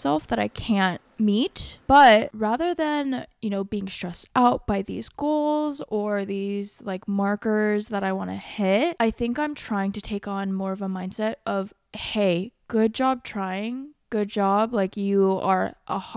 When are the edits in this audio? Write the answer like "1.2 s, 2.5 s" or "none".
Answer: 1.0 s, 2.3 s, 8.9 s